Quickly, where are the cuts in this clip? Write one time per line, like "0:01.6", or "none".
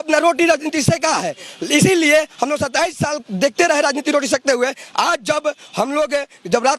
none